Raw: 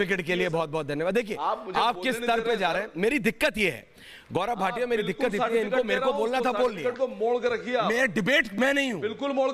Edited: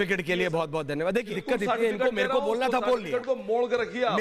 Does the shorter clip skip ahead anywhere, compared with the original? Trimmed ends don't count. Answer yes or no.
yes